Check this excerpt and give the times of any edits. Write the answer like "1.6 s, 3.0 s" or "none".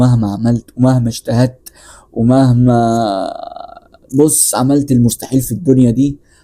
none